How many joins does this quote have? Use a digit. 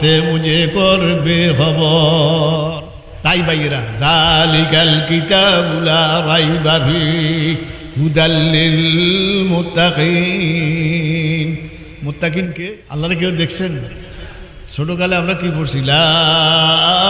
2